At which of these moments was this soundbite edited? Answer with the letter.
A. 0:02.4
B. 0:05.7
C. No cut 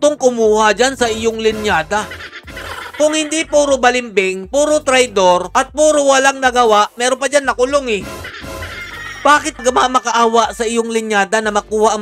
C